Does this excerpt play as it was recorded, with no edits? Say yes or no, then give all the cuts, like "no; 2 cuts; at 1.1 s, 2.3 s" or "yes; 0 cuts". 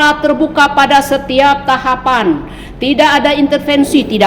yes; 0 cuts